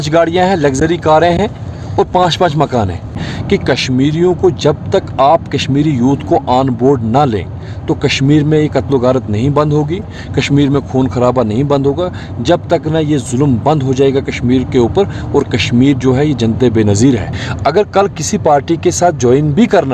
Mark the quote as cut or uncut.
cut